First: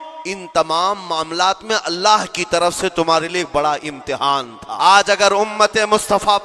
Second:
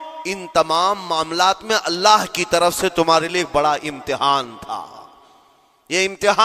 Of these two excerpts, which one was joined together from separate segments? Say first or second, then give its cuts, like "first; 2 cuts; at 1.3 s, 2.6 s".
first; 1 cut; at 4.6 s